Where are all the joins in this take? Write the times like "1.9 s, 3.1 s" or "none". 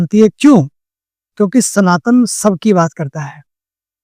none